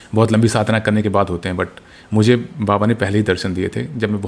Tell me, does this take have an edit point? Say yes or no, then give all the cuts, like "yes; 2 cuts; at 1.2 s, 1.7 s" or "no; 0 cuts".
no; 0 cuts